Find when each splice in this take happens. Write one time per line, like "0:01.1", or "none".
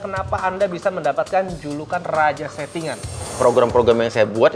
0:03.2